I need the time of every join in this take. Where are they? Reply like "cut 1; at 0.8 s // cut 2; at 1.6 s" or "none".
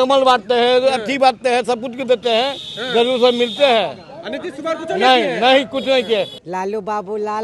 cut 1; at 6.4 s